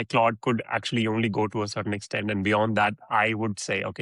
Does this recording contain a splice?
no; 0 cuts

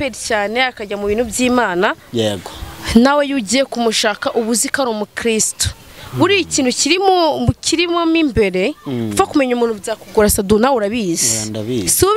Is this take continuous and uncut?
yes; 0 cuts

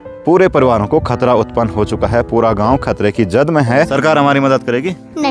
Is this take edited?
yes; 1 cut; at 3.9 s

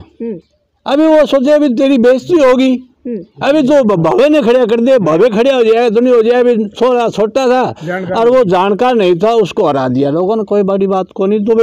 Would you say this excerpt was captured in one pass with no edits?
yes; 0 cuts

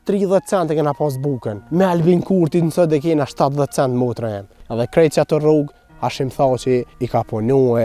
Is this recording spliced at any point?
yes; 3 cuts; at 1.5 s, 4.6 s, 7.0 s

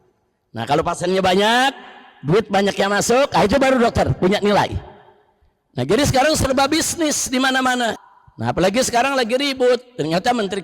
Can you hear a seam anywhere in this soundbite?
yes; 1 cut; at 8.0 s

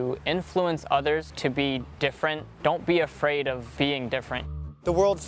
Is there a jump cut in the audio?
yes; 4 cuts; at 1.3 s, 2.5 s, 3.7 s, 4.5 s

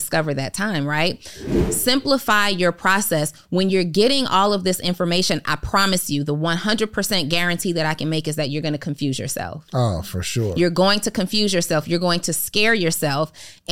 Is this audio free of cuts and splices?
no; 1 cut; at 1.5 s

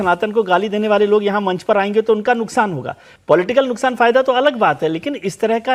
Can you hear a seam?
no; 0 cuts

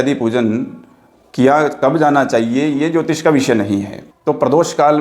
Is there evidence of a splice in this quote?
yes; 1 cut; at 4.0 s

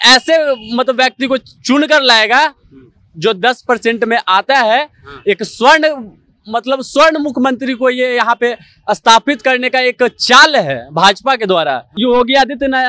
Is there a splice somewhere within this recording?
yes; 1 cut; at 11.9 s

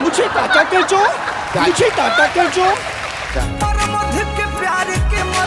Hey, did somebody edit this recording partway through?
yes; 1 cut; at 3.1 s

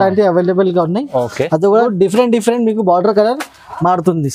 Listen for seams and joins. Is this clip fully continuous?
no; 1 cut; at 1.9 s

